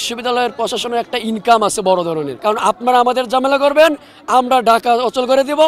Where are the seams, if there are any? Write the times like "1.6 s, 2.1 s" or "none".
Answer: 2.3 s